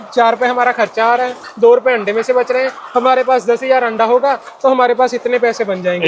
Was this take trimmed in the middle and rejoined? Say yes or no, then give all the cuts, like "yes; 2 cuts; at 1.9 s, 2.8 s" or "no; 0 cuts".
no; 0 cuts